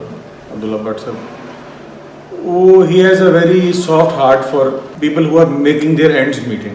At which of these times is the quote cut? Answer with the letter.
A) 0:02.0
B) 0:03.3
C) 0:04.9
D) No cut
C